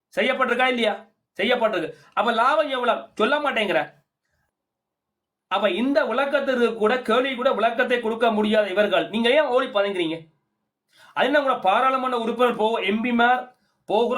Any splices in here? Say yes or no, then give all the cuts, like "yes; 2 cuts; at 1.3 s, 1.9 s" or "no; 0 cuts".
yes; 1 cut; at 4.3 s